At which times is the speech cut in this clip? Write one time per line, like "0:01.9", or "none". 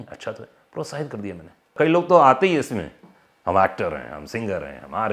0:01.7